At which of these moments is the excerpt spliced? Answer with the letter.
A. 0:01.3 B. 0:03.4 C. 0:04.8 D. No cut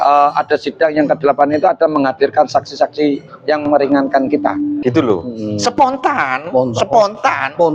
C